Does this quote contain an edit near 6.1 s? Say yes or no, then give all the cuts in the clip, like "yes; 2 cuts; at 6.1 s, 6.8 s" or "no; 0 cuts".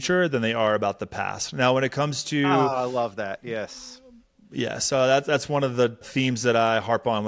yes; 1 cut; at 6.1 s